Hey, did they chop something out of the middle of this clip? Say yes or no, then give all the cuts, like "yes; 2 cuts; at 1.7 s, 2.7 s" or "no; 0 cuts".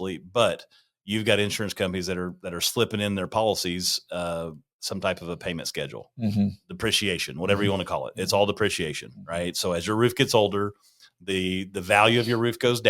no; 0 cuts